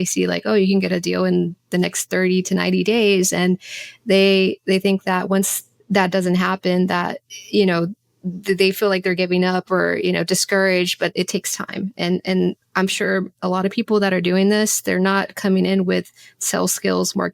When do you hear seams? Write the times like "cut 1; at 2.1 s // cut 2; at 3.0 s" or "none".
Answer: cut 1; at 11.1 s